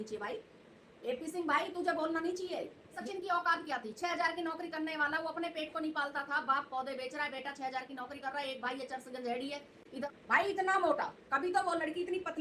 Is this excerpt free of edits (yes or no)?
no